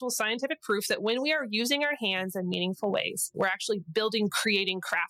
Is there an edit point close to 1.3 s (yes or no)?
no